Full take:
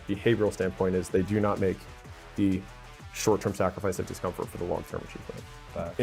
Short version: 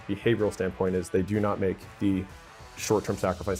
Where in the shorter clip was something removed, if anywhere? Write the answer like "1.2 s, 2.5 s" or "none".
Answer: 1.9 s